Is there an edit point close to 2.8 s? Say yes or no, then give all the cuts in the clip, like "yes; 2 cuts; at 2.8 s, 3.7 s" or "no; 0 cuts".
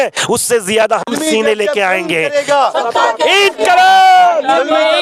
no; 0 cuts